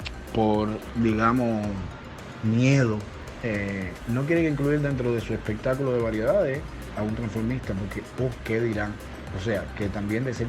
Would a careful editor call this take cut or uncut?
cut